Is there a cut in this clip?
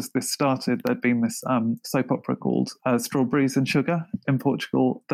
no; 0 cuts

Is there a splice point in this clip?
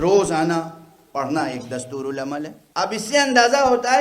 yes; 1 cut; at 2.6 s

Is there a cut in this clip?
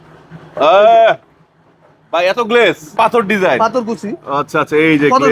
yes; 1 cut; at 2.9 s

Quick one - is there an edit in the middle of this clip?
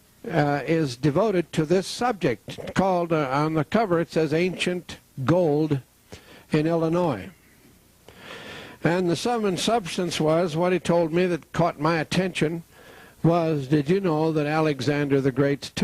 yes; 1 cut; at 7.6 s

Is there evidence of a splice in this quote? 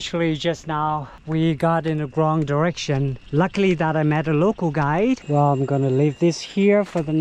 yes; 3 cuts; at 1.1 s, 3.2 s, 5.2 s

